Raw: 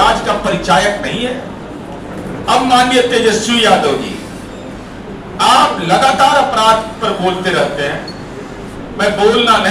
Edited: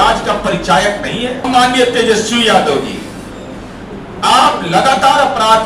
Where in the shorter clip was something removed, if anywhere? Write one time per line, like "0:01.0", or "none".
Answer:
0:01.4